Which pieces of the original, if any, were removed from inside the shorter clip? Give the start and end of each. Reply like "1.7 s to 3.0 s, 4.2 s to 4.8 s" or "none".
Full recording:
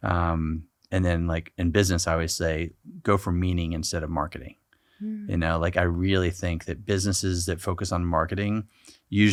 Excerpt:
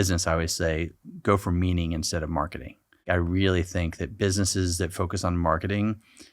4.8 s to 5.7 s